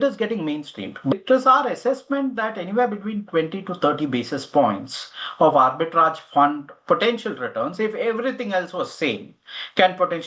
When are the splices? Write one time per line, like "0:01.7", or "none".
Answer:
0:01.1

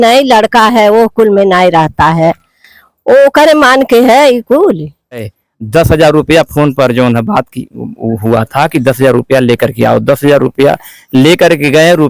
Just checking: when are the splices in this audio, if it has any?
0:05.4

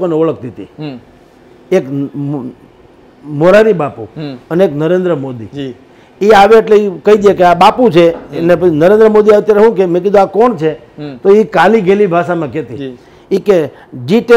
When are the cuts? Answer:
none

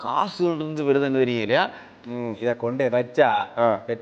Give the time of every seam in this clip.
0:01.9

